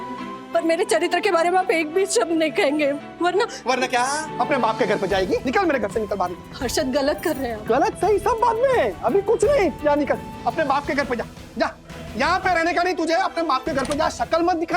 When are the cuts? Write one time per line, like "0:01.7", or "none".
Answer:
0:04.3
0:05.4